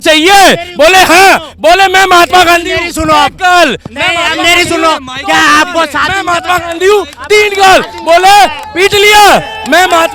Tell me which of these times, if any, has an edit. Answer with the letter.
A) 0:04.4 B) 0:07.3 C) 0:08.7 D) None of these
D